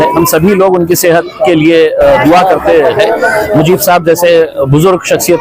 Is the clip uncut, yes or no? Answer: yes